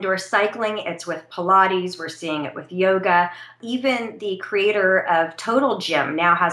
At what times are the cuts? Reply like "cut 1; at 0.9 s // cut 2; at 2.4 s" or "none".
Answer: cut 1; at 3.5 s